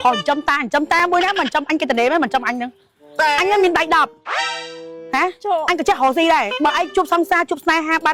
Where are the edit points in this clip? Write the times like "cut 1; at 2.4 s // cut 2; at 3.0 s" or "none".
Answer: none